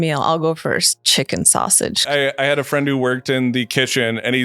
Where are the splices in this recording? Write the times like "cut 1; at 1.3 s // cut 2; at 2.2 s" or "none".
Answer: cut 1; at 2.1 s